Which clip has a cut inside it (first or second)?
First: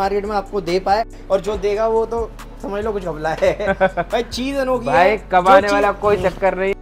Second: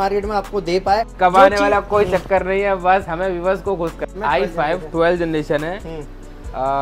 second